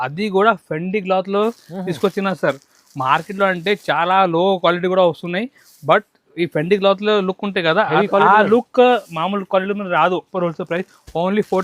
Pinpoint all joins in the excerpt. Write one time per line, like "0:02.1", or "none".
0:10.3